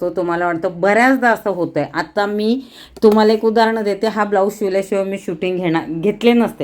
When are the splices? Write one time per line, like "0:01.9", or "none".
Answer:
none